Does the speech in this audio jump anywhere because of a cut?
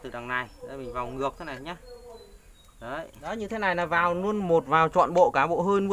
yes; 1 cut; at 3.2 s

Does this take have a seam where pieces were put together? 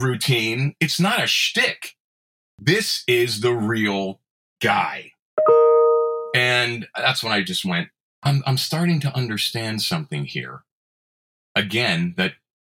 yes; 1 cut; at 8.0 s

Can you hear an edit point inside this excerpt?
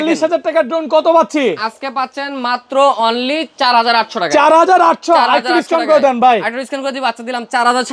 no; 0 cuts

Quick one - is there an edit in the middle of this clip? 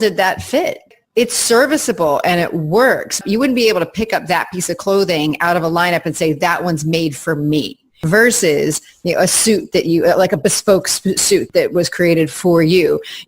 yes; 4 cuts; at 0.9 s, 3.2 s, 8.0 s, 11.5 s

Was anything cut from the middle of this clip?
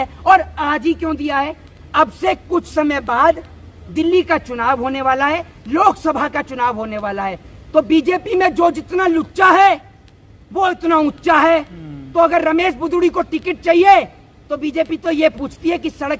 no; 0 cuts

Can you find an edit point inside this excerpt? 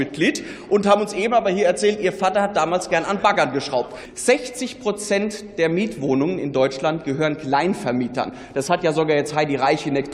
yes; 1 cut; at 4.0 s

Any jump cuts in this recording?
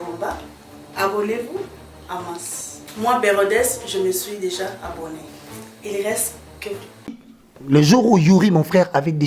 yes; 1 cut; at 7.1 s

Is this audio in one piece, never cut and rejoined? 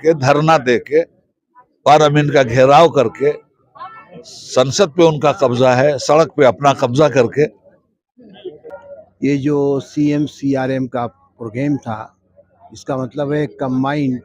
yes; 0 cuts

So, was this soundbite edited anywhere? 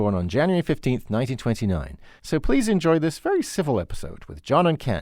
no; 0 cuts

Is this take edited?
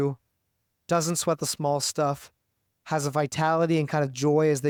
no; 0 cuts

